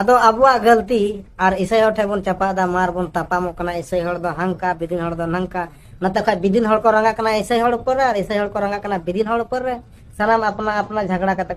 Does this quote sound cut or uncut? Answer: uncut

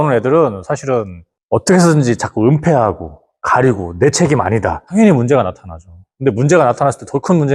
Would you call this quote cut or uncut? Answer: cut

